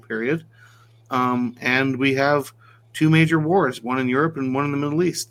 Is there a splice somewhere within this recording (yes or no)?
no